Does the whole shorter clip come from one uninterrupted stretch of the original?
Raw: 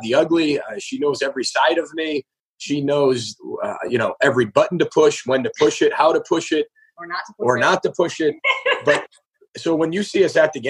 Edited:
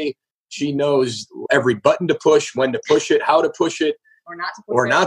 no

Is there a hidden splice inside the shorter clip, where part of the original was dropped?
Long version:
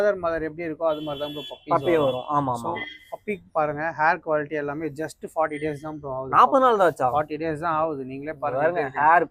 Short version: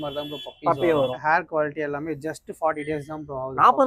yes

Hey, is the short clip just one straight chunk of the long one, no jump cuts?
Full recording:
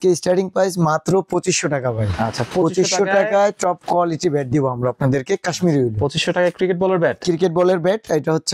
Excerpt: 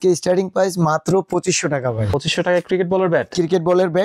no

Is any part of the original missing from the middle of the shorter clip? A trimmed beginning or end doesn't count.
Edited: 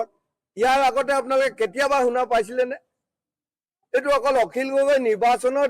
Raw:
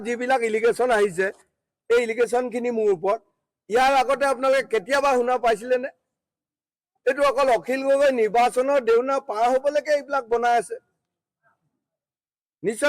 no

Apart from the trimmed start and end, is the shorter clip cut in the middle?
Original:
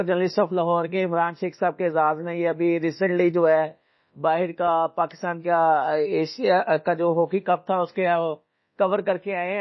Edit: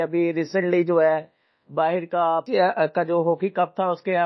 yes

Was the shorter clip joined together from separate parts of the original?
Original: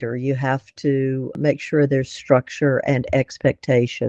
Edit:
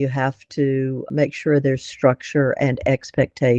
no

